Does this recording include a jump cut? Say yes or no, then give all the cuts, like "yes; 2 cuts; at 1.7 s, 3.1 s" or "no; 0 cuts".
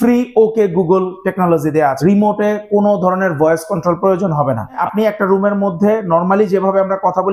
yes; 2 cuts; at 2.0 s, 4.8 s